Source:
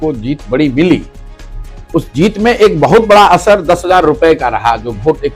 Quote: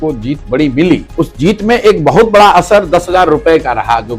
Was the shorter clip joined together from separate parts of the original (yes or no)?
yes